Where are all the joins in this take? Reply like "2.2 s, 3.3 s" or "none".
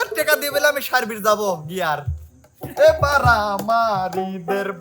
2.6 s